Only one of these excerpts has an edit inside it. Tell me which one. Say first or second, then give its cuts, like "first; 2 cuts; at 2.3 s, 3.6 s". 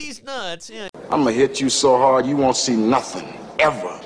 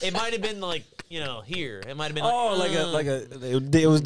first; 1 cut; at 1.1 s